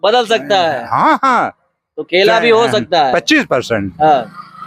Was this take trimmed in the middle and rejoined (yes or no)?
no